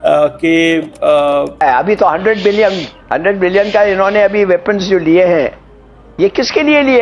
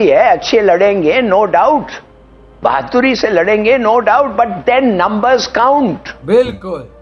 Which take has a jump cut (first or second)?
first